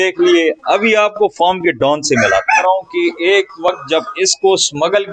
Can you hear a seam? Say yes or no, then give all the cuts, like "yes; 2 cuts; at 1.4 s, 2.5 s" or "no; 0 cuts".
yes; 1 cut; at 2.6 s